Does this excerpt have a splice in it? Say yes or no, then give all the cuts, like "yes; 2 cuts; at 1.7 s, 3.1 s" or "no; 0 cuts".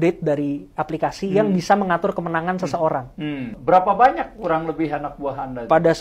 yes; 1 cut; at 3.5 s